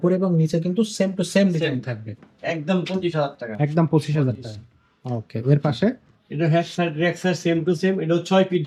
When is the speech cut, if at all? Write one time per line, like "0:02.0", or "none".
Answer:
none